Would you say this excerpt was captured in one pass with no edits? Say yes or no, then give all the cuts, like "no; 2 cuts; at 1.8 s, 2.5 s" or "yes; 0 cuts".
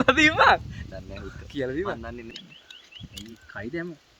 no; 1 cut; at 2.2 s